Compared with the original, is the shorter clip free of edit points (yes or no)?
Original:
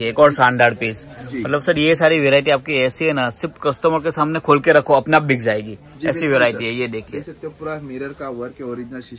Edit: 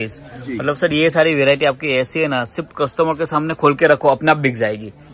yes